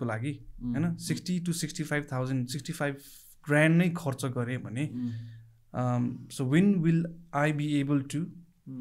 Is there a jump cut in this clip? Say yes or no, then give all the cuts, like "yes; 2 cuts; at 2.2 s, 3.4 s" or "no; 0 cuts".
no; 0 cuts